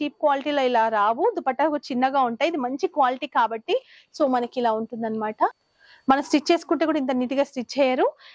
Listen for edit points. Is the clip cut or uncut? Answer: cut